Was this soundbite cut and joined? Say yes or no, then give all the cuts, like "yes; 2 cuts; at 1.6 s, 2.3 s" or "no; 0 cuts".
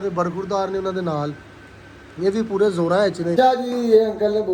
yes; 1 cut; at 3.4 s